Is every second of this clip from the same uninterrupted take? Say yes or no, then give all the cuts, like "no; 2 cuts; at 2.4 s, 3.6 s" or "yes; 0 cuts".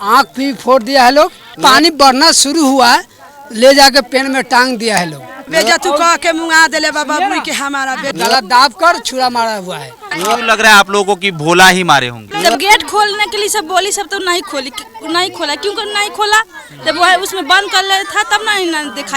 no; 5 cuts; at 1.6 s, 5.5 s, 8.1 s, 10.1 s, 12.2 s